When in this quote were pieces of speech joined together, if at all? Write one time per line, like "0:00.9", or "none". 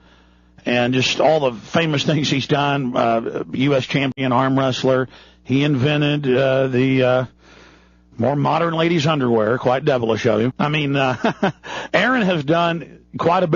0:06.5